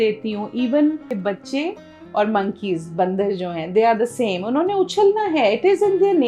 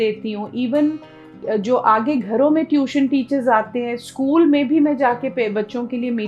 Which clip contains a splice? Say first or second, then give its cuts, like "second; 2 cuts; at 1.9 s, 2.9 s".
first; 1 cut; at 1.1 s